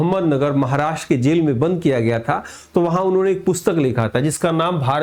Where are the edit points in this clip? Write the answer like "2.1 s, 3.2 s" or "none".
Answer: none